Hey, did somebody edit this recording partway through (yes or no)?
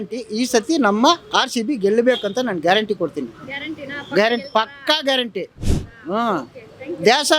no